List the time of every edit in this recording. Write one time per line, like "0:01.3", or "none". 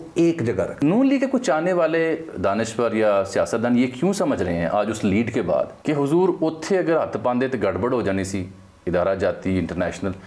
0:00.8
0:05.8